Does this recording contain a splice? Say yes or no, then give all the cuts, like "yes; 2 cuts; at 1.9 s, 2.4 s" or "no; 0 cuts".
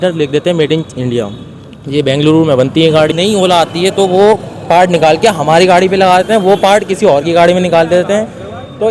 yes; 1 cut; at 3.1 s